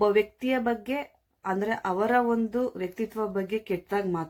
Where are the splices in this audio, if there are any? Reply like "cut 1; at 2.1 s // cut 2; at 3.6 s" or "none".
none